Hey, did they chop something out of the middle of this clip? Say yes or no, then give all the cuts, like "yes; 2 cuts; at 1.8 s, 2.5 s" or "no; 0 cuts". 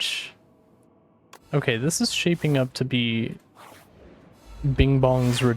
no; 0 cuts